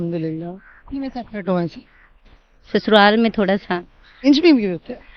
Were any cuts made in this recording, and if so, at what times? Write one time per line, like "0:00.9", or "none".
0:04.2

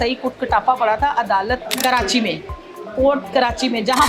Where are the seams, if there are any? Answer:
0:01.7

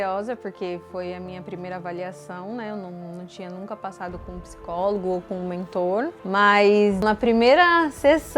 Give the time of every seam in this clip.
0:07.0

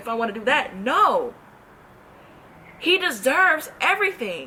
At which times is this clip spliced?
none

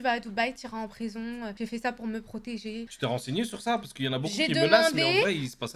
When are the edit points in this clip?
none

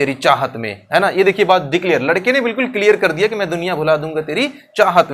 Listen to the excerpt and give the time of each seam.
none

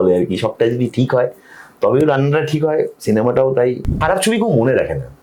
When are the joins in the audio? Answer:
0:04.0

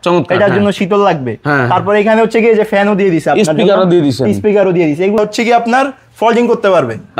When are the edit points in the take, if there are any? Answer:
0:05.2

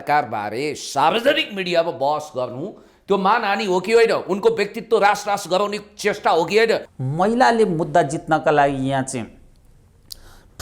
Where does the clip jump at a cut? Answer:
0:06.9

